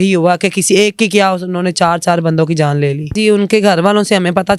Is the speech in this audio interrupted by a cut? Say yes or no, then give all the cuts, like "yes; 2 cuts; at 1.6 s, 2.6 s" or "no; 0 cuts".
yes; 1 cut; at 3.1 s